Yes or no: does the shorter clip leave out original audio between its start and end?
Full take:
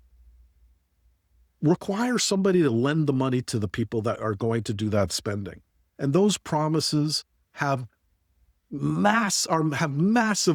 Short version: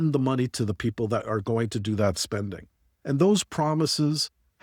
no